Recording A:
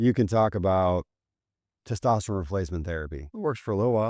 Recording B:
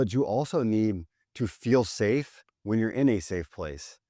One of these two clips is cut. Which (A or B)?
A